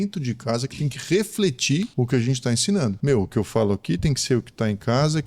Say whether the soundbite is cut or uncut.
cut